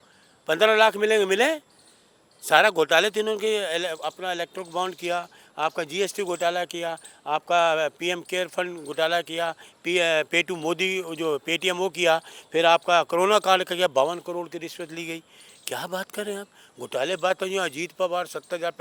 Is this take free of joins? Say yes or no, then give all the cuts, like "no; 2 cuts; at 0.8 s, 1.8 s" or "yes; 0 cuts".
yes; 0 cuts